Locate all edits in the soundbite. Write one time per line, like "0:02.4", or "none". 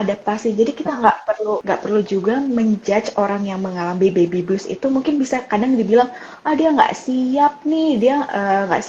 0:01.6